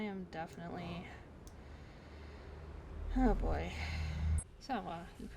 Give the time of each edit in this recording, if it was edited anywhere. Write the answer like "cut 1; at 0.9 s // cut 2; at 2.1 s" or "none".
cut 1; at 4.5 s

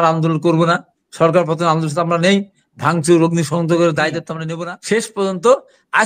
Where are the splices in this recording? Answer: cut 1; at 4.4 s

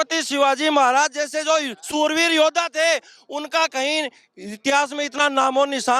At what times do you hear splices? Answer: none

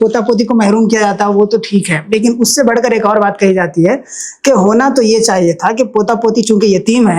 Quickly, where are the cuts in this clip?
none

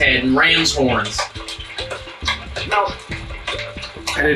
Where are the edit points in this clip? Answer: cut 1; at 3.1 s

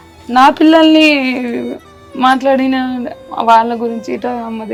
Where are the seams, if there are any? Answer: none

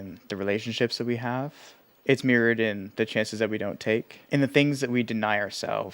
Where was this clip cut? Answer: cut 1; at 4.2 s

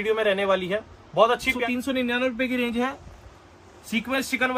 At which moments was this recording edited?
cut 1; at 1.5 s

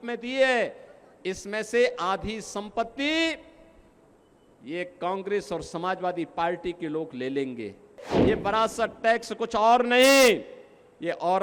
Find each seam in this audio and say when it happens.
cut 1; at 8.1 s

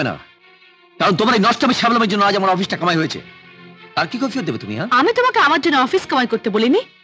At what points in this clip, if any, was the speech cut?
none

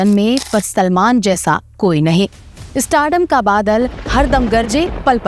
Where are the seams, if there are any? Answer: none

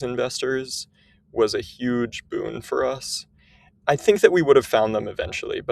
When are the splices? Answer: cut 1; at 3.8 s

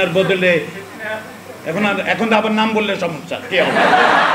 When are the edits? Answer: none

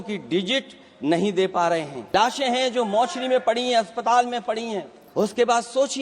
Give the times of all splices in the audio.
cut 1; at 2.1 s // cut 2; at 5.0 s

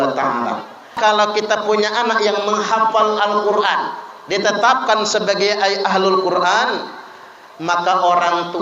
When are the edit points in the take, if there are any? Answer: cut 1; at 1.0 s

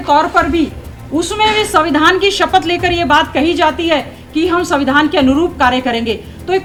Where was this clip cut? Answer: none

